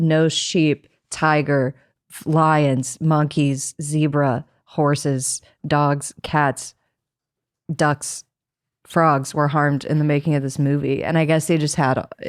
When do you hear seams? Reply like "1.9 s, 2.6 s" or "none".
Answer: none